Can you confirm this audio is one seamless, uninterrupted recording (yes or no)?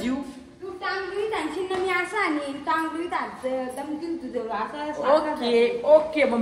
yes